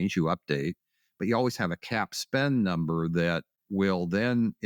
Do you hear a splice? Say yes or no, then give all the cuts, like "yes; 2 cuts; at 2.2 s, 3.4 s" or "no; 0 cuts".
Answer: yes; 1 cut; at 3.5 s